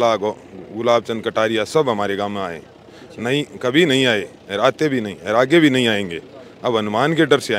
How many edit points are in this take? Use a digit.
0